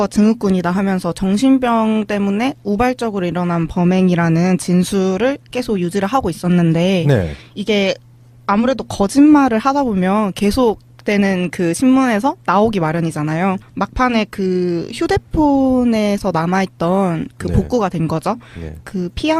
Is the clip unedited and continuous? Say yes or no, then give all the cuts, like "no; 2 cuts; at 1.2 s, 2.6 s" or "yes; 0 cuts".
yes; 0 cuts